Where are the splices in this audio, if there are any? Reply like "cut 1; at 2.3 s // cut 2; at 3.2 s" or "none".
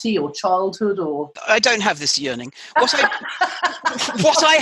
cut 1; at 1.4 s